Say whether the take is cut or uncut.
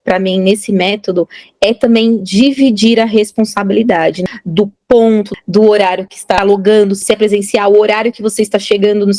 cut